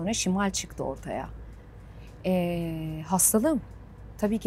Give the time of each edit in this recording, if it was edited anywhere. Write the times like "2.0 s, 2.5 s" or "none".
none